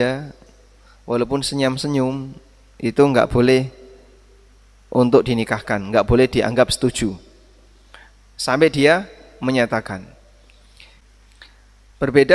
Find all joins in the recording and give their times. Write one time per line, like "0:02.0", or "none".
0:11.0